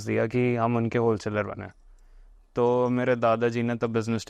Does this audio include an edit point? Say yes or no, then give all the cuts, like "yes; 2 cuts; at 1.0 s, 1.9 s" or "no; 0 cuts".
no; 0 cuts